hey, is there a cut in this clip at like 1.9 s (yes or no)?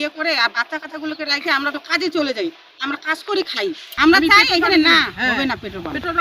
no